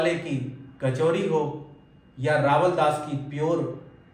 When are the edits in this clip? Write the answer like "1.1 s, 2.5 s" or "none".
none